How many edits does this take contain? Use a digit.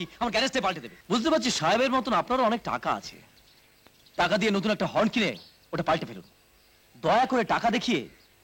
1